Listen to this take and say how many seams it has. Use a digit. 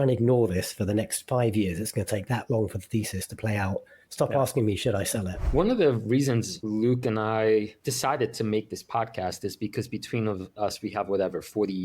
3